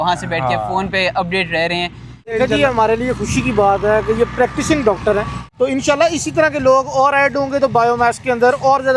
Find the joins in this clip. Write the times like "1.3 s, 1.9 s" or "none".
2.4 s, 5.4 s